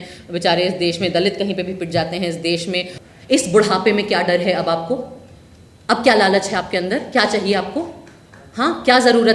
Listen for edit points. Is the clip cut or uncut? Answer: cut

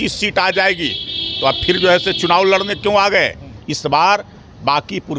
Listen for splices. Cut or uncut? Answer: cut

